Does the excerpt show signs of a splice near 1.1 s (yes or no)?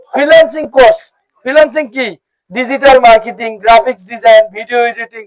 no